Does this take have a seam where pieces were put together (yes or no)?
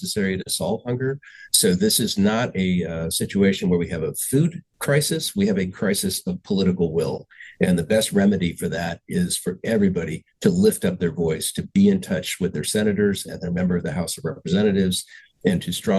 no